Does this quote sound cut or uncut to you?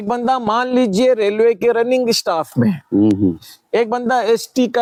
uncut